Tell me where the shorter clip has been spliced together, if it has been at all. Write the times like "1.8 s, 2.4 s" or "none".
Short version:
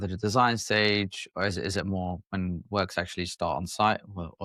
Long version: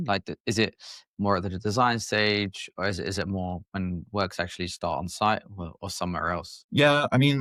none